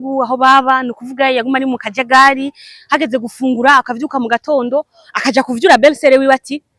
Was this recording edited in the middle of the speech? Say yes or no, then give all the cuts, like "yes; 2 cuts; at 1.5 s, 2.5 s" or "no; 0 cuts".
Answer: no; 0 cuts